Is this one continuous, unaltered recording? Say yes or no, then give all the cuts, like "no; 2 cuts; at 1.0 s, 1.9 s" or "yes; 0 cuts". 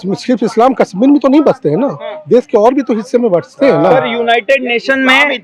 yes; 0 cuts